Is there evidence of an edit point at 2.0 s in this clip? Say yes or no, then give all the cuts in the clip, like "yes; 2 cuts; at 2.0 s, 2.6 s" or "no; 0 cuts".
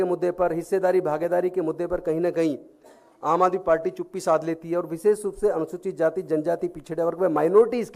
no; 0 cuts